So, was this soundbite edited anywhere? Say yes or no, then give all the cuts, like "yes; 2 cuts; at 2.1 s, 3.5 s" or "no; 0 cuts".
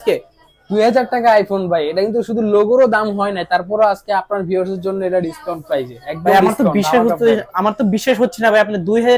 no; 0 cuts